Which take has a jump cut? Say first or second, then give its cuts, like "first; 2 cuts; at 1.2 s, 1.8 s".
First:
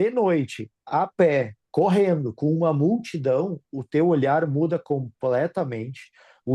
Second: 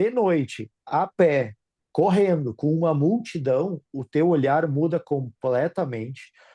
first; 1 cut; at 1.6 s